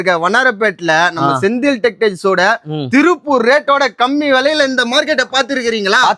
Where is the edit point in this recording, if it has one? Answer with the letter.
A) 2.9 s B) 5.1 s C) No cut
C